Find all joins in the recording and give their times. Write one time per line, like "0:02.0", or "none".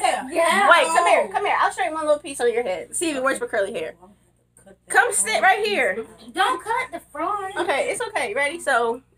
none